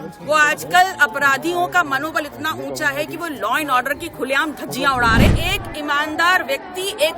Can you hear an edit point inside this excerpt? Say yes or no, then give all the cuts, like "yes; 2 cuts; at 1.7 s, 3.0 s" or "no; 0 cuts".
yes; 1 cut; at 5.3 s